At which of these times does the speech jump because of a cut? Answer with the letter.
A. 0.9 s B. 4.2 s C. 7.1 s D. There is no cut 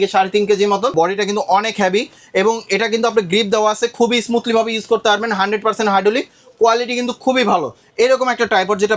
A